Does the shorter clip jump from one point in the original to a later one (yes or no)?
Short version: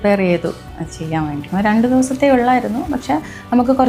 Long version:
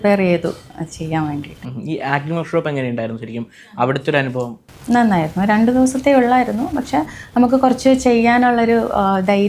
yes